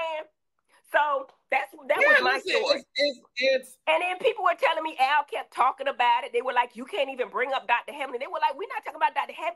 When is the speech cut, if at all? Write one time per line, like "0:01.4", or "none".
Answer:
none